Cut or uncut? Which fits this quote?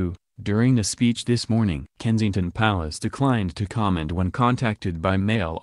cut